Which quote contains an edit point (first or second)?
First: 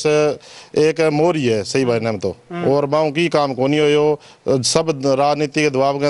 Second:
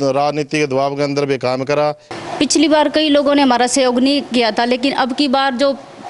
second